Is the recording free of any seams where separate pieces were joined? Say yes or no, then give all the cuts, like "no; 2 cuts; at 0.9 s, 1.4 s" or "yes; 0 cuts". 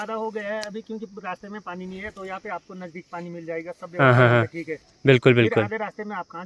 yes; 0 cuts